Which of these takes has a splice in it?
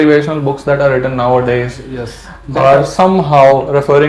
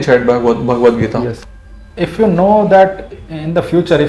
second; 1 cut; at 1.3 s

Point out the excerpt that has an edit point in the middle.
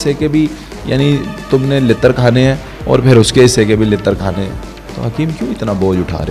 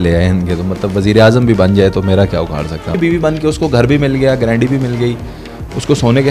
second; 1 cut; at 3.0 s

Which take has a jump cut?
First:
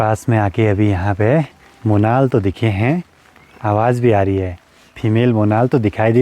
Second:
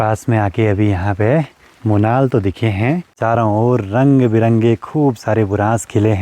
second; 1 cut; at 3.2 s

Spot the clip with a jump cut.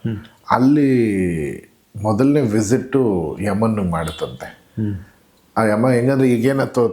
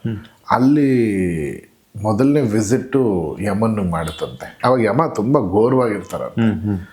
second; 1 cut; at 4.5 s

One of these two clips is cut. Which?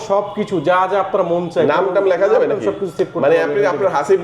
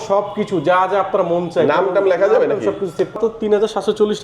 second; 1 cut; at 3.2 s

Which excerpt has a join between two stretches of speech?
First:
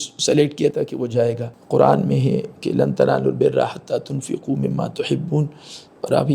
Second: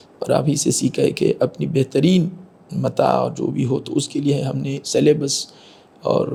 first; 1 cut; at 1.5 s

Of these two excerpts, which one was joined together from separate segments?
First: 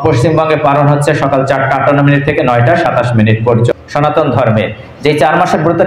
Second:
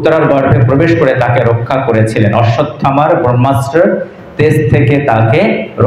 first; 1 cut; at 3.7 s

